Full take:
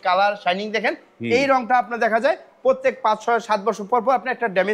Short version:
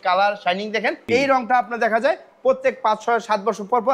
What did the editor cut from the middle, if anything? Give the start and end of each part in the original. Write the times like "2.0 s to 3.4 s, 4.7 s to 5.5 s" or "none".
1.0 s to 1.2 s